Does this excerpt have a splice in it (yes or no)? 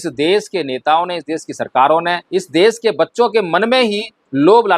yes